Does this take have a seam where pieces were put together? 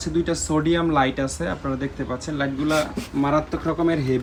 no; 0 cuts

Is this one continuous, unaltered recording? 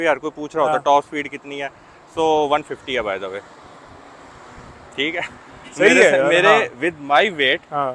yes; 0 cuts

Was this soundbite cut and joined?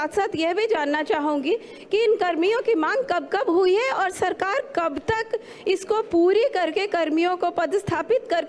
no; 0 cuts

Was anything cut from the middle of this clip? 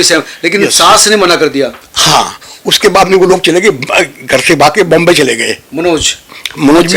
no; 0 cuts

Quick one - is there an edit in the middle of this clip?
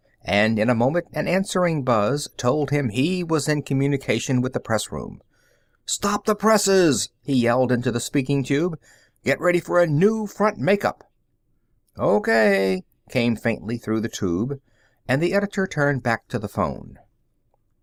no; 0 cuts

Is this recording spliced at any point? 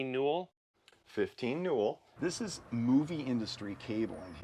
yes; 1 cut; at 2.1 s

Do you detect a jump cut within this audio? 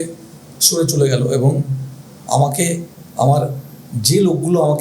no; 0 cuts

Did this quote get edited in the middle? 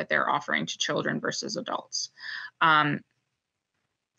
no; 0 cuts

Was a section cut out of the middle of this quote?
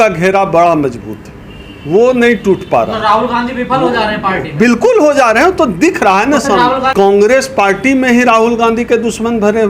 yes; 1 cut; at 6.9 s

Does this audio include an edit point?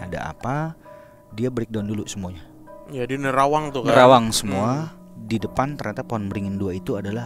no; 0 cuts

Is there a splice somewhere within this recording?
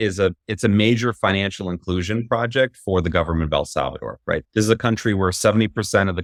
no; 0 cuts

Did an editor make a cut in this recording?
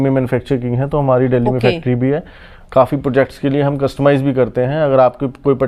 no; 0 cuts

